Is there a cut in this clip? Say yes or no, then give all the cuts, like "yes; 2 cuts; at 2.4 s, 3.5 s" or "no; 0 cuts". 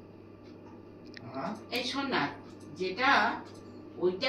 no; 0 cuts